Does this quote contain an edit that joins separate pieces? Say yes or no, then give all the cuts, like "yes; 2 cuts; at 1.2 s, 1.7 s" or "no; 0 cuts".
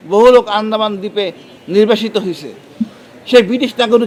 no; 0 cuts